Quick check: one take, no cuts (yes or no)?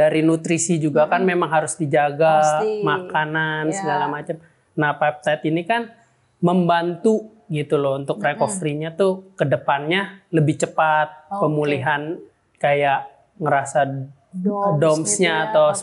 yes